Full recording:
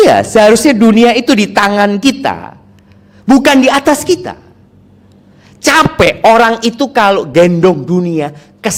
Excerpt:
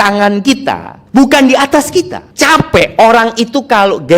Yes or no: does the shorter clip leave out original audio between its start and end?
yes